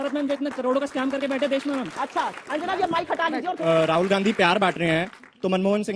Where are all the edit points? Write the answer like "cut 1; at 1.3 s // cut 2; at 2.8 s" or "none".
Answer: cut 1; at 2.3 s // cut 2; at 3.6 s